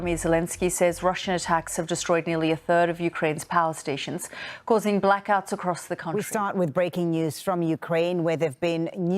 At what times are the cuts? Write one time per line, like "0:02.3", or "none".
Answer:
0:05.9